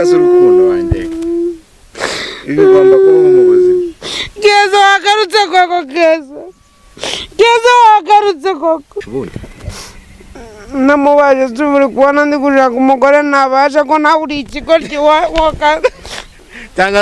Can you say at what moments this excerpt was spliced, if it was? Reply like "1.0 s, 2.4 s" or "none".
9.0 s